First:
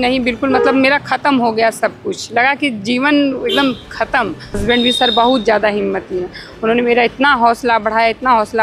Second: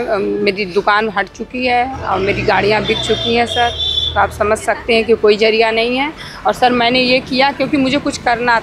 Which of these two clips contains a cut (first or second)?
first